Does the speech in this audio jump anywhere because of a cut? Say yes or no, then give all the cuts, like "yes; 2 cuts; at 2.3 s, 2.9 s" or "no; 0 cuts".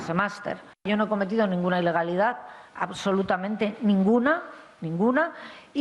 no; 0 cuts